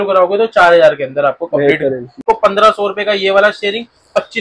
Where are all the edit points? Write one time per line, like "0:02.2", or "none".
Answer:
0:02.2